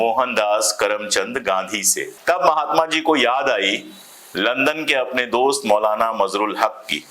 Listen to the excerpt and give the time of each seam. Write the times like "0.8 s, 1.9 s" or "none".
2.1 s